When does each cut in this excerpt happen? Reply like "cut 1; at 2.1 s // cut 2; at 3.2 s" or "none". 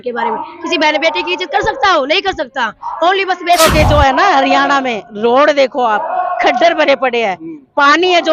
cut 1; at 3.6 s